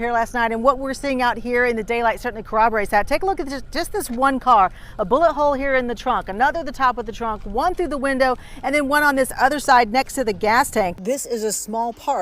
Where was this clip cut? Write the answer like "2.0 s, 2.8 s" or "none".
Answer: 10.9 s